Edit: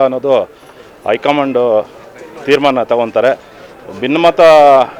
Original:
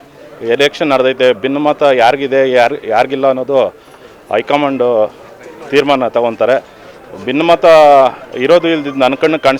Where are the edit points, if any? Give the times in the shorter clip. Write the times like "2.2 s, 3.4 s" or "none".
none